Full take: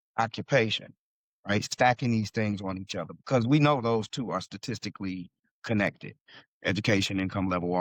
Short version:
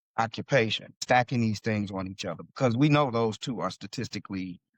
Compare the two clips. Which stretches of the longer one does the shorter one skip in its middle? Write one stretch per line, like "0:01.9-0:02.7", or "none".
0:01.0-0:01.7